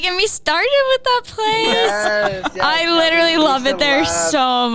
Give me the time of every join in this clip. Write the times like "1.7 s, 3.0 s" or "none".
none

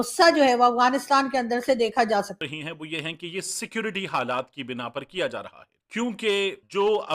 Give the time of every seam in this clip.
2.3 s

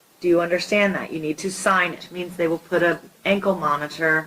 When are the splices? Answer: 2.2 s

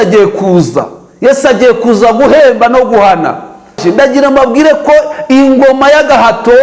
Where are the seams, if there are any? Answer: 3.8 s

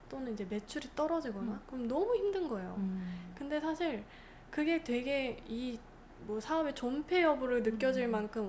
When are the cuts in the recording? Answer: none

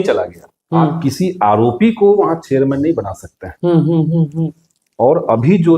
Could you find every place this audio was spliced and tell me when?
1.0 s

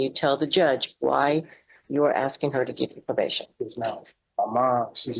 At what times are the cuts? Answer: 4.2 s

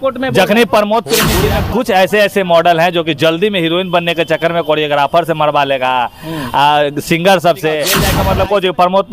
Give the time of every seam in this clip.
1.3 s, 8.1 s

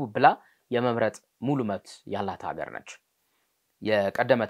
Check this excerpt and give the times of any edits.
none

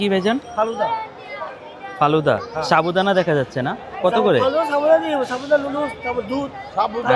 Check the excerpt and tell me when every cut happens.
none

